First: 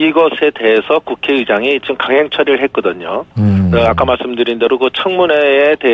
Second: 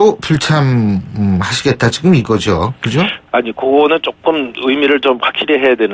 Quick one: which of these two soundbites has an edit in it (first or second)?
first